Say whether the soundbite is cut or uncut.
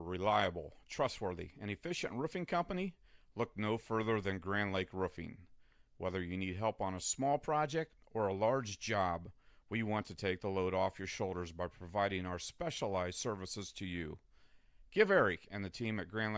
uncut